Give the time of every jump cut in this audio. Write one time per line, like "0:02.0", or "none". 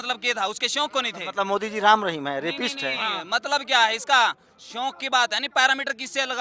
none